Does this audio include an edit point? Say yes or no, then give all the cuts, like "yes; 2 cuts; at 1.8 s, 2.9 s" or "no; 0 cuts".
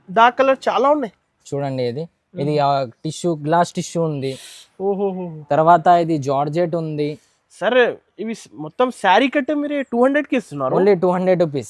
no; 0 cuts